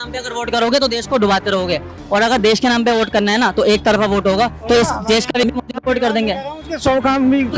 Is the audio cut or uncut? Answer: cut